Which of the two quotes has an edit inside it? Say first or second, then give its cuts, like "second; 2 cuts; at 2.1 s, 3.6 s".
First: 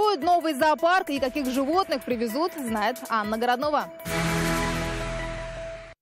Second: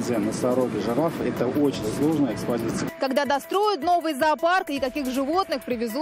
first; 1 cut; at 4.0 s